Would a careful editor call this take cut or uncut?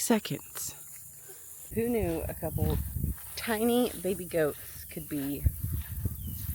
cut